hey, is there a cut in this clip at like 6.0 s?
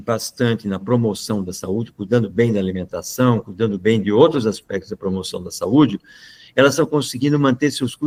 no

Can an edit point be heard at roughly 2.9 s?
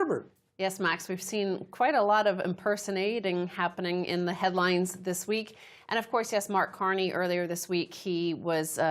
yes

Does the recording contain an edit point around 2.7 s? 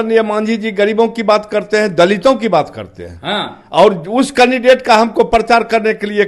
no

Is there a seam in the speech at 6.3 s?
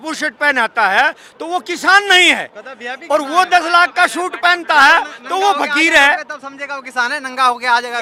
no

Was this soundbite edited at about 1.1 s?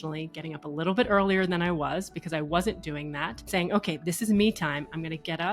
no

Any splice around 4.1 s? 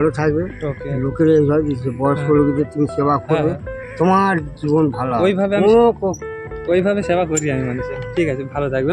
no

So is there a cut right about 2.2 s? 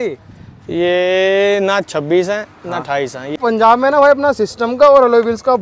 no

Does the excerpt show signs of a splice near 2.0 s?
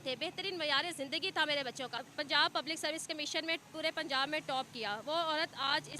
yes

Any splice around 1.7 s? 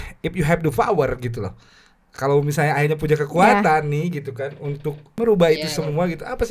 no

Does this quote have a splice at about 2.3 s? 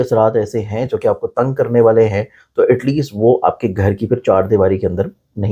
no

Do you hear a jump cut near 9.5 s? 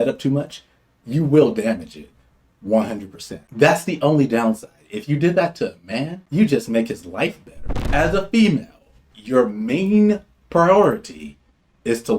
no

